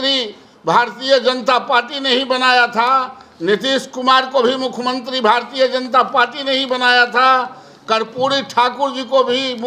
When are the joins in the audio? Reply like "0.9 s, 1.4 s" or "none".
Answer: none